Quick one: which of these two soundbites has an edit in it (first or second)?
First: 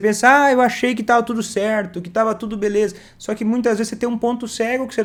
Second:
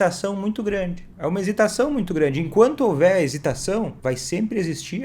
second